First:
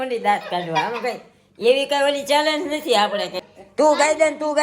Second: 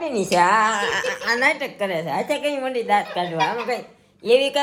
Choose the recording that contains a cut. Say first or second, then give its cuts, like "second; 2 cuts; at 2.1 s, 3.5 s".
first; 1 cut; at 3.4 s